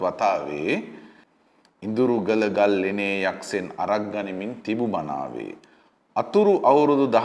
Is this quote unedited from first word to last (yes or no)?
yes